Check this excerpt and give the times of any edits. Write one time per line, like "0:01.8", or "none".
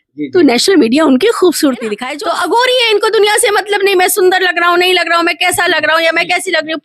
0:02.0